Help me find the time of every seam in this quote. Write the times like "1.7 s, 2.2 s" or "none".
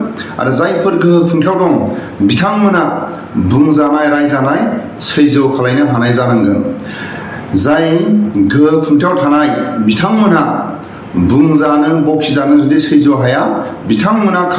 none